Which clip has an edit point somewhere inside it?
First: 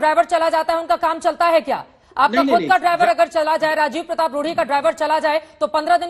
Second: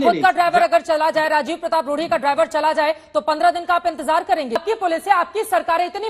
second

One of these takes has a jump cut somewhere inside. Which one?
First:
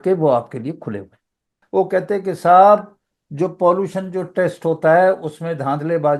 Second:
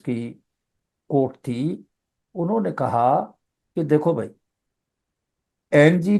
first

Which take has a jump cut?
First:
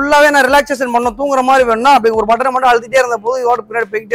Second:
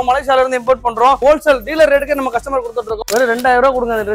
second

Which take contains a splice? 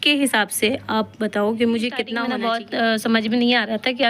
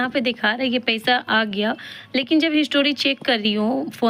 first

